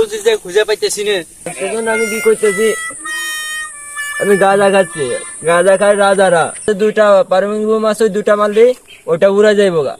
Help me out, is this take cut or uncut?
cut